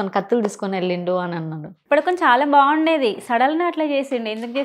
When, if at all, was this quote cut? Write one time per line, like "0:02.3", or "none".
0:01.7